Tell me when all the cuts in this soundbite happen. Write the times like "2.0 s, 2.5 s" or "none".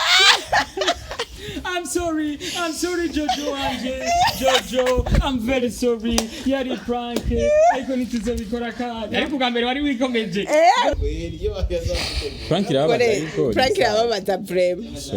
10.9 s